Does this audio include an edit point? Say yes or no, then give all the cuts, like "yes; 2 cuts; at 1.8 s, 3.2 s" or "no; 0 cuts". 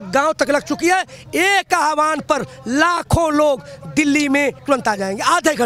yes; 1 cut; at 4.6 s